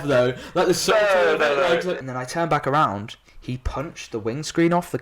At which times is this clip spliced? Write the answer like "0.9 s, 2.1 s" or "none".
2.0 s

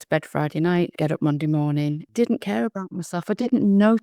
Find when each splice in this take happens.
0.9 s, 2.0 s

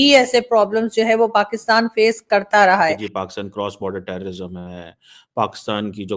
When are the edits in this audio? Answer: 3.2 s

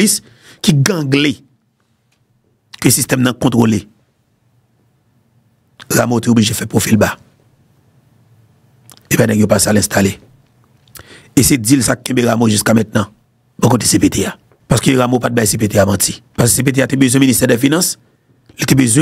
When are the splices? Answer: 14.5 s, 16.2 s

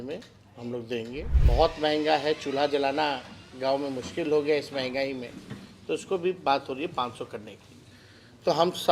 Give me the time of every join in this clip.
1.3 s

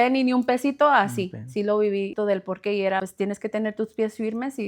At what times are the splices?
2.1 s, 3.1 s

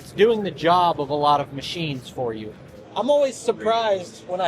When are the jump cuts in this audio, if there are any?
2.6 s

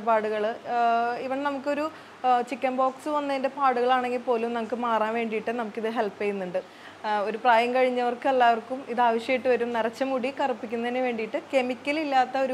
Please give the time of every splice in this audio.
6.7 s

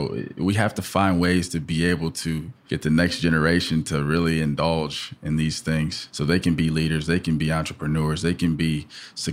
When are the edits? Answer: 2.5 s, 6.0 s

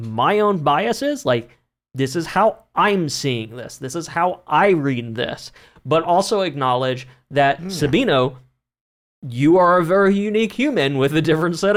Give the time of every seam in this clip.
none

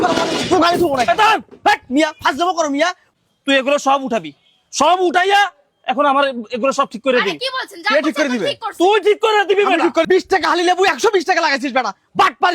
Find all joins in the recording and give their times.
3.0 s, 10.1 s

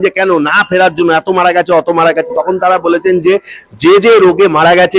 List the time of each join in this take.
none

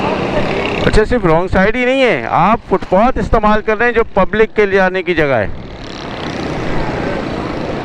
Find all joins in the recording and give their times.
none

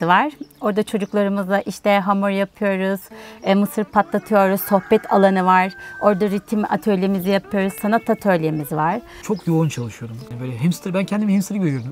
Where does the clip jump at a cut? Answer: 9.1 s, 10.3 s

